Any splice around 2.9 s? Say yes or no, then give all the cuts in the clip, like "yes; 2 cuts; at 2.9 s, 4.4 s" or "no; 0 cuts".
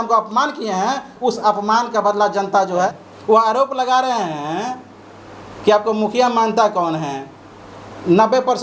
yes; 1 cut; at 2.9 s